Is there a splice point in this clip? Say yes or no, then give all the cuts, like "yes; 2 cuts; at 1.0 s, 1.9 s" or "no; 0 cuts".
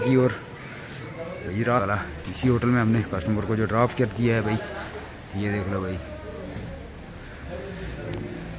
yes; 1 cut; at 1.8 s